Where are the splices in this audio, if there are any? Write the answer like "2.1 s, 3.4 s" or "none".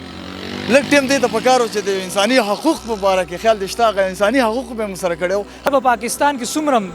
5.7 s